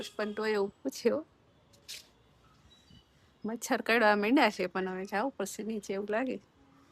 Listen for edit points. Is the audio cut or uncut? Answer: uncut